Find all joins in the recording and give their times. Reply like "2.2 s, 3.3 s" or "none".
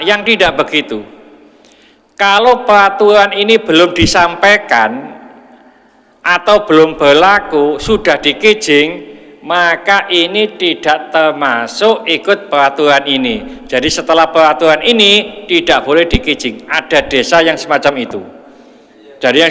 none